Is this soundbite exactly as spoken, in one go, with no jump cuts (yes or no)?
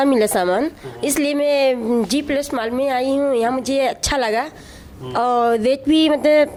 yes